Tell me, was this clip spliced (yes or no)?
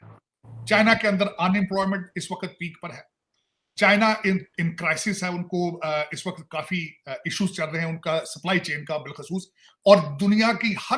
no